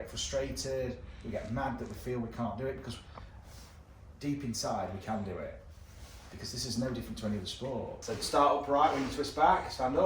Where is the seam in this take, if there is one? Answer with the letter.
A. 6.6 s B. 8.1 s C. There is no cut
B